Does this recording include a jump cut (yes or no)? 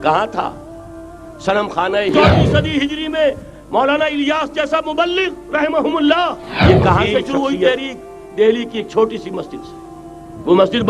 yes